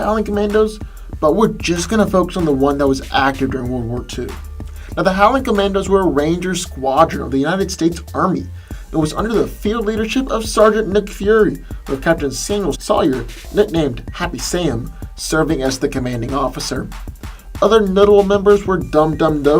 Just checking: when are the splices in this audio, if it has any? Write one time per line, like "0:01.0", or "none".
0:06.2

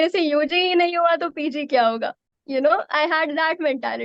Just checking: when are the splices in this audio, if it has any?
none

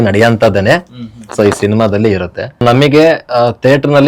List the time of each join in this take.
0:02.6

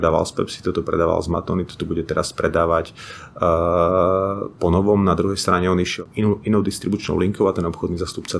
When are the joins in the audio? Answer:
0:06.0

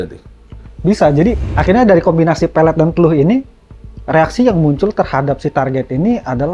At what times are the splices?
0:01.4

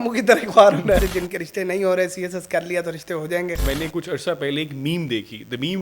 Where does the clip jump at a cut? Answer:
0:01.0
0:03.6

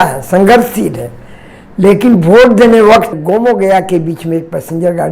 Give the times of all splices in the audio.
0:03.2

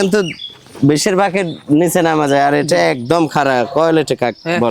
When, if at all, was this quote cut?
none

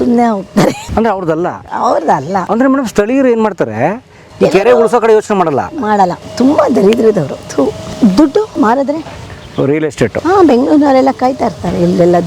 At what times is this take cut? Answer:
0:00.8
0:02.4
0:06.2
0:07.8
0:08.5

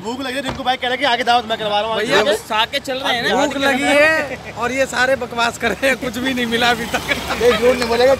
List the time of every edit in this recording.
none

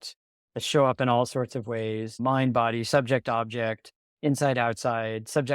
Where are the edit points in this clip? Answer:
0:02.1

